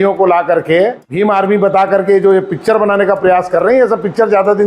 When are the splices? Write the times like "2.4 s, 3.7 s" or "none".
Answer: 1.0 s